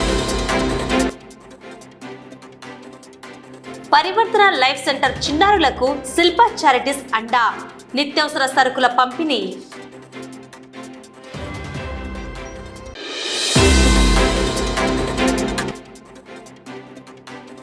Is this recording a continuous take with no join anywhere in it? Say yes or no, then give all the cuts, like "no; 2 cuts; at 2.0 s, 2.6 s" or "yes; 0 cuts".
yes; 0 cuts